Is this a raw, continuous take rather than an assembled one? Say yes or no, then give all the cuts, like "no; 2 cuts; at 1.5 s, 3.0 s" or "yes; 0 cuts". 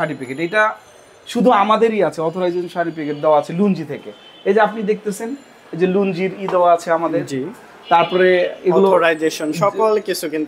yes; 0 cuts